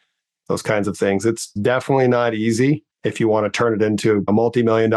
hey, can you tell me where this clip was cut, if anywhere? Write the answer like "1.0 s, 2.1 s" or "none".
1.5 s, 3.0 s, 4.2 s